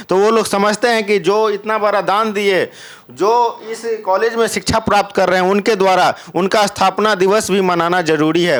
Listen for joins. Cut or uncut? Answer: uncut